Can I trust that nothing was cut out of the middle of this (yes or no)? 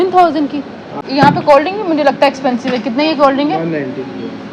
no